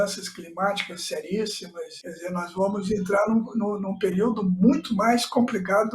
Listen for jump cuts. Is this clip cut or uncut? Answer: cut